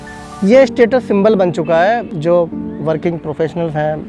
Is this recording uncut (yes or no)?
no